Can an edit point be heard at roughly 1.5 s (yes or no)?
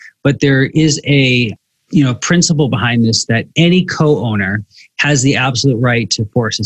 no